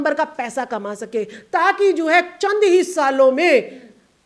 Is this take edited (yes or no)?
no